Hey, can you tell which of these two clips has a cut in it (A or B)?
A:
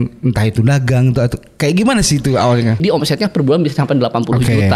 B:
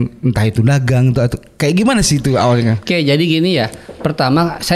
A